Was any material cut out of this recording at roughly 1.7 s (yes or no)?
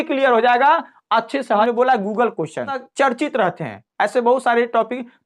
yes